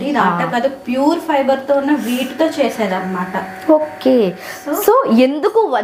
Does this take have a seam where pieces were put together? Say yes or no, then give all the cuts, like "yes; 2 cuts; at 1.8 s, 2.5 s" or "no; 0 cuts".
no; 0 cuts